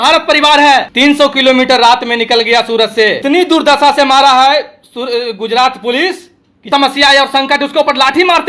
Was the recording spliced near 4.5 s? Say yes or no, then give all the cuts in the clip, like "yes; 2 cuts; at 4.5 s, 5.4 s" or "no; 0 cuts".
no; 3 cuts; at 0.9 s, 3.2 s, 6.6 s